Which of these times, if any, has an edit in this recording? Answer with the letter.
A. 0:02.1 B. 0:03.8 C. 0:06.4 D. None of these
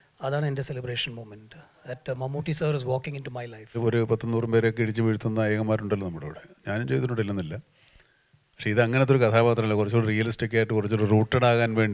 B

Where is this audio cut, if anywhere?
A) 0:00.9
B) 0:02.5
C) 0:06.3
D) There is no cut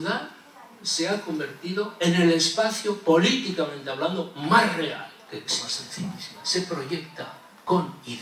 C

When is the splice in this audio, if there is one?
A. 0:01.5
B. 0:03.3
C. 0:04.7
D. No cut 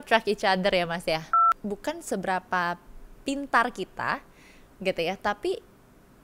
A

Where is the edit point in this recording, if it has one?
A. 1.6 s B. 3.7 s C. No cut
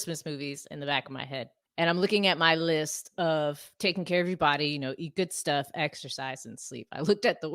A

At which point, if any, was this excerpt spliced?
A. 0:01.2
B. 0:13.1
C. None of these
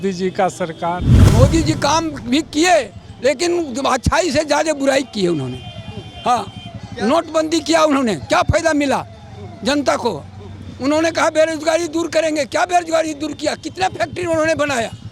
A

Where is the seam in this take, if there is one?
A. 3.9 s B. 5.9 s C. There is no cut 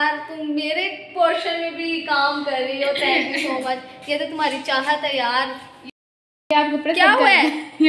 B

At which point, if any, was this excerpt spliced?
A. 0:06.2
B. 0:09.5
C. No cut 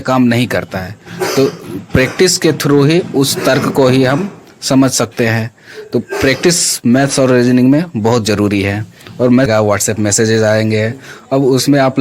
B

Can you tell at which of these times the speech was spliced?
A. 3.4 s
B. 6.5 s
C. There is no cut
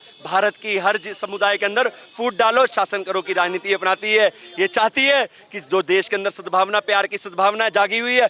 C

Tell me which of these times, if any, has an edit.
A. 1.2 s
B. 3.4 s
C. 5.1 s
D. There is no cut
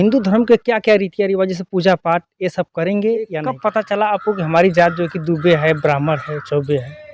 B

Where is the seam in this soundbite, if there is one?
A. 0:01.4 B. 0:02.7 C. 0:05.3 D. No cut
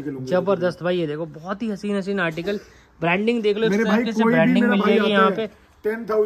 D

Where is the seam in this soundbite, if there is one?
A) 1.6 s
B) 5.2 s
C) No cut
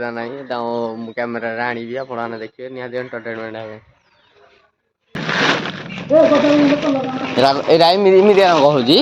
B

